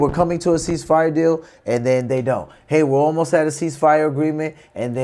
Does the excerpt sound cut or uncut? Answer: uncut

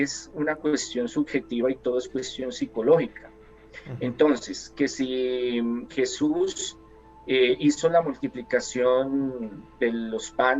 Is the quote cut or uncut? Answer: uncut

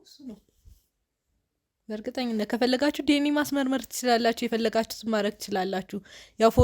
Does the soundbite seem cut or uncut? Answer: uncut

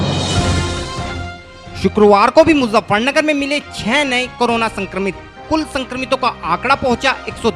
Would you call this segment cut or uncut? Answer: cut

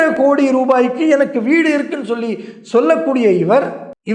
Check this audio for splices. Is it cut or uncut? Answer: uncut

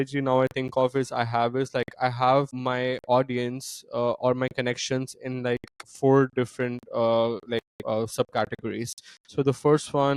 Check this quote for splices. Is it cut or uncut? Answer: uncut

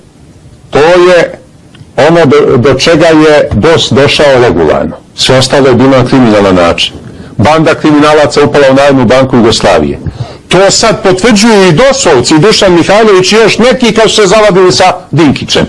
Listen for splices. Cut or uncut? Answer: cut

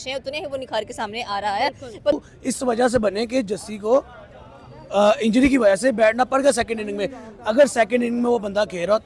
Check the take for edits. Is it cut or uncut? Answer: cut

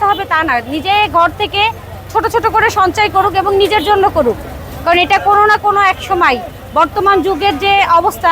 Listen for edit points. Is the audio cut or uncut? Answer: uncut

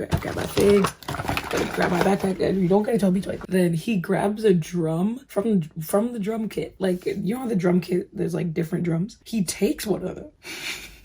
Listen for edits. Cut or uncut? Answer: uncut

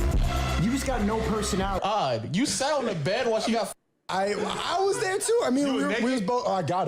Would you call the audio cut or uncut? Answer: cut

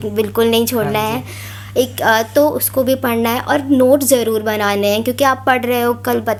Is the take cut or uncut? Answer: uncut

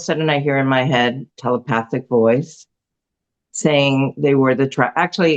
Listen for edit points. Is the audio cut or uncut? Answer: uncut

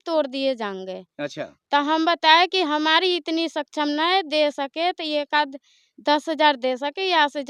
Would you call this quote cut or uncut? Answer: uncut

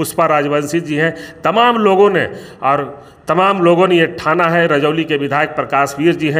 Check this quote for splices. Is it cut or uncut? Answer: uncut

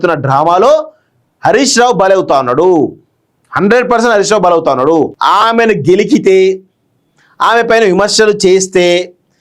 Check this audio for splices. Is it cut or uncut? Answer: cut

